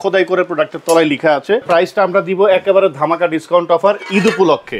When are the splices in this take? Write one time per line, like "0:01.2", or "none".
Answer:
0:01.6